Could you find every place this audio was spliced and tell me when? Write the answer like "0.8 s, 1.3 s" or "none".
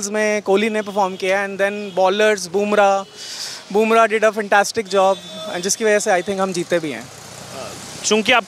none

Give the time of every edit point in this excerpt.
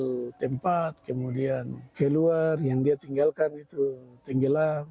1.8 s

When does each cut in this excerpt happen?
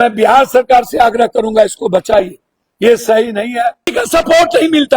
3.9 s

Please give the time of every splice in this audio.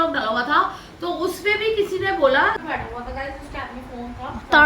2.6 s

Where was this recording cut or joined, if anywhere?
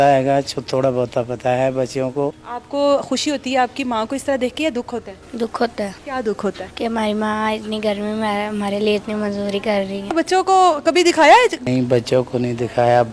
2.5 s, 6.0 s, 6.7 s, 10.1 s, 11.6 s

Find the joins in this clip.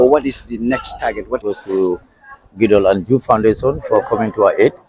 1.4 s

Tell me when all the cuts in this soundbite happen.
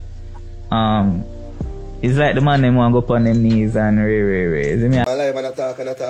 5.0 s

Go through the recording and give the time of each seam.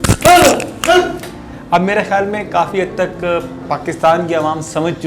1.5 s

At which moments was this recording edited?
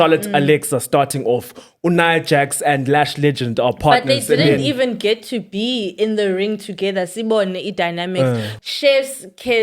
8.6 s

